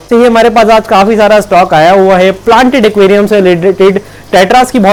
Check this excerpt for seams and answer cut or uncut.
uncut